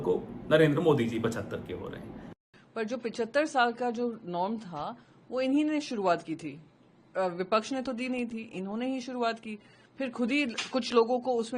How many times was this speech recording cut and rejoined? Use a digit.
1